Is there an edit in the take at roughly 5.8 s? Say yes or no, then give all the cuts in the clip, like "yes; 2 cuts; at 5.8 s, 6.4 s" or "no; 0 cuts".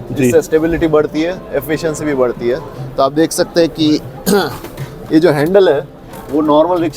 no; 1 cut; at 2.7 s